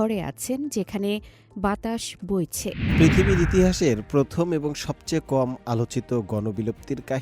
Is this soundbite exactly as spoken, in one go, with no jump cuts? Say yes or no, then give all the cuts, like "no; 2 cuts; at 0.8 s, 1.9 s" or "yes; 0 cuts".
no; 1 cut; at 2.8 s